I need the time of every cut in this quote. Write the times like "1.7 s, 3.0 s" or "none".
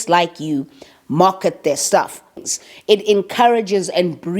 2.2 s